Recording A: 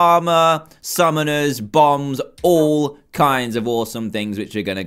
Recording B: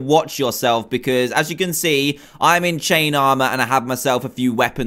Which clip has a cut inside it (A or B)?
B